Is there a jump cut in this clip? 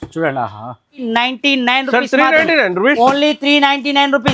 yes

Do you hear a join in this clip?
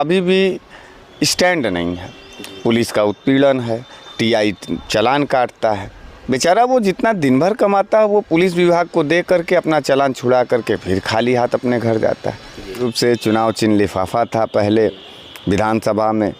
yes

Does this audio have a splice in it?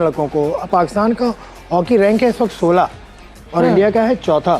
no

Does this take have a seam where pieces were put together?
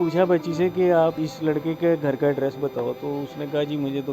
yes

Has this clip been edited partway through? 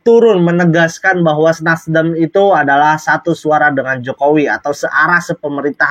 no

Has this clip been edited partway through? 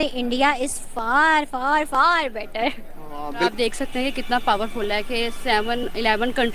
yes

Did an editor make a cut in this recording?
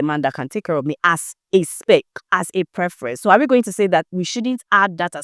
no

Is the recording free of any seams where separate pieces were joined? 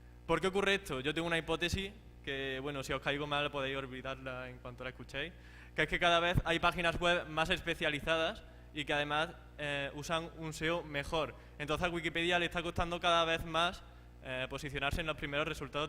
no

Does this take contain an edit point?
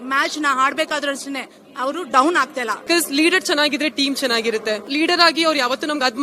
yes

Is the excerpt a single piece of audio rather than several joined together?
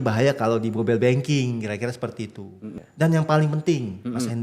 no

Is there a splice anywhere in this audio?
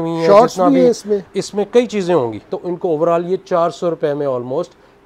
yes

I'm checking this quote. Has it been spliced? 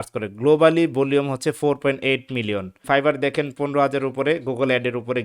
yes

